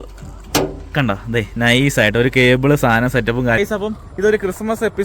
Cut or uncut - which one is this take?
cut